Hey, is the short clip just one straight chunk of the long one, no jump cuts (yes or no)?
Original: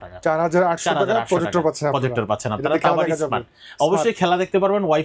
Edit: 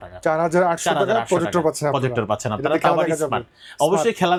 yes